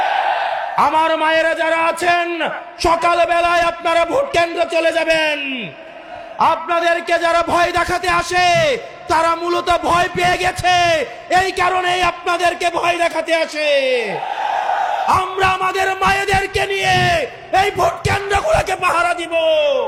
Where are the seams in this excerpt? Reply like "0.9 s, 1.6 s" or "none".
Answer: none